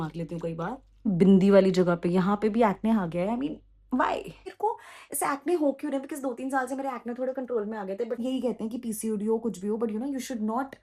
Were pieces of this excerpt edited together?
yes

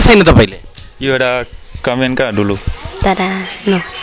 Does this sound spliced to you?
no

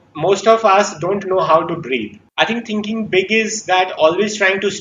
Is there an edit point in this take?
yes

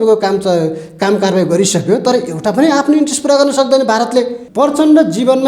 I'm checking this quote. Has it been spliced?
yes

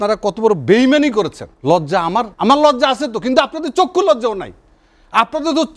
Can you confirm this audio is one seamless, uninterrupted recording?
no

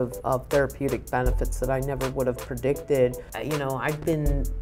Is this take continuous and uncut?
no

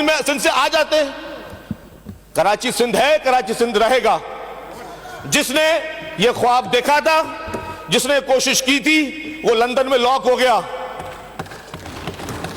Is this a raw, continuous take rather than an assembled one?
yes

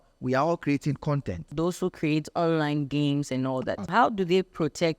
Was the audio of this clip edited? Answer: yes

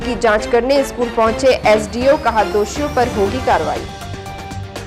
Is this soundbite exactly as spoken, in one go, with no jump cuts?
yes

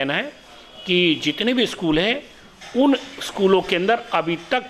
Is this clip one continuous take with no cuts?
yes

